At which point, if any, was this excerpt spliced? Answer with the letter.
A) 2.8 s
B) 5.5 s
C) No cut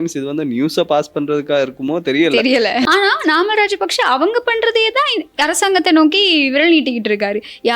A